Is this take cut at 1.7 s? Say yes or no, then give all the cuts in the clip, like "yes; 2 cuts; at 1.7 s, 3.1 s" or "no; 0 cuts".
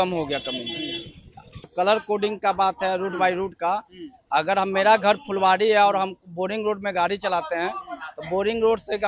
yes; 1 cut; at 1.7 s